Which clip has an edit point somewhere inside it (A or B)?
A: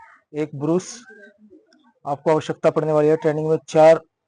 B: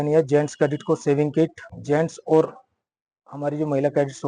B